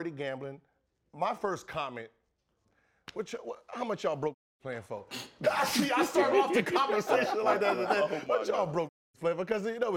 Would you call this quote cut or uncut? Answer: uncut